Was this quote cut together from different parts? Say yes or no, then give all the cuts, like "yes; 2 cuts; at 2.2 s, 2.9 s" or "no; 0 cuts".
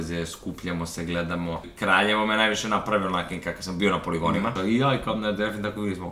yes; 2 cuts; at 1.7 s, 4.5 s